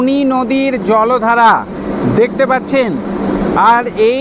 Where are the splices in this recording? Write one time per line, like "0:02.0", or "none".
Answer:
none